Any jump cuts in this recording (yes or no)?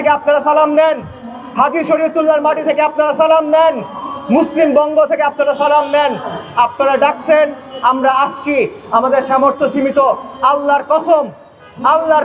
no